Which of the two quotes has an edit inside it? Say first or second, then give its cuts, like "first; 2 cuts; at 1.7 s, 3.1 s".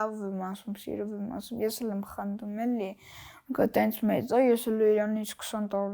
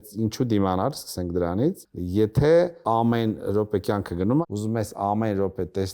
second; 3 cuts; at 1.9 s, 2.8 s, 4.4 s